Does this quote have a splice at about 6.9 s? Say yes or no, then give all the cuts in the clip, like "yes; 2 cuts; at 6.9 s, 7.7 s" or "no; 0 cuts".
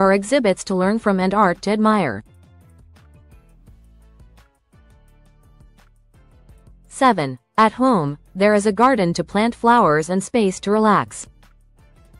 yes; 3 cuts; at 2.3 s, 6.9 s, 11.3 s